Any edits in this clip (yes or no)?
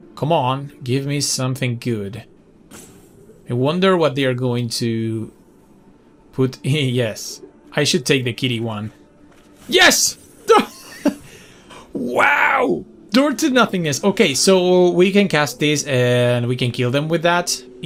no